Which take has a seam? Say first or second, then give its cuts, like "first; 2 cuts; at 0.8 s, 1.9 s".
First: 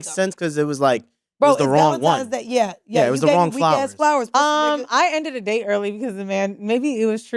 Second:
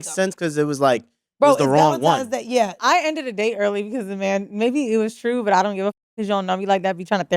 second; 1 cut; at 2.8 s